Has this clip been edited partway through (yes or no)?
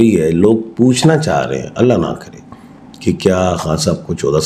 no